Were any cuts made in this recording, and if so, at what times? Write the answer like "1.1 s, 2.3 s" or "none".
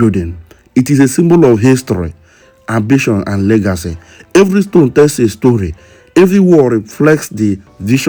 none